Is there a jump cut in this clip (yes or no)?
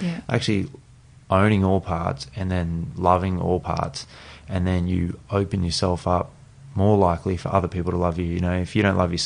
no